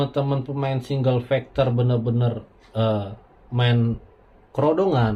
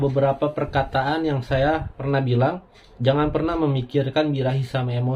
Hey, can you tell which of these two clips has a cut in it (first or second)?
second